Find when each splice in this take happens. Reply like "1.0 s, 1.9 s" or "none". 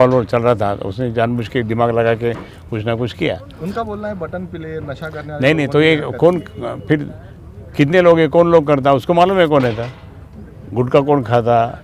none